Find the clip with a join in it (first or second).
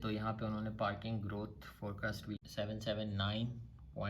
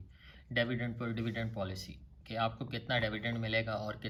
first